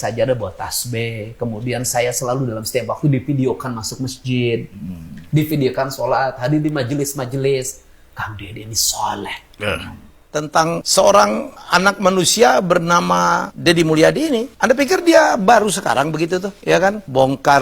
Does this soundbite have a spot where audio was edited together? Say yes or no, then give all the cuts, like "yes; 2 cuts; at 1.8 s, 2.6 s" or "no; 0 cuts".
yes; 1 cut; at 10.3 s